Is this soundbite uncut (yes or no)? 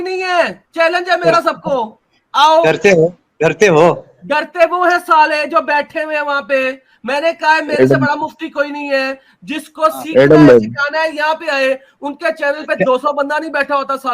yes